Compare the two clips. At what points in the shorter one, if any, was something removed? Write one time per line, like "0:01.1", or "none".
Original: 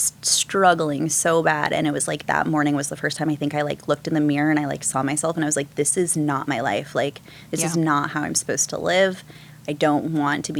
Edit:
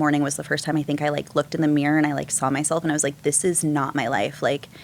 none